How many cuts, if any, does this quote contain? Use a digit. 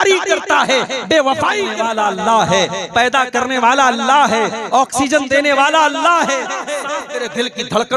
2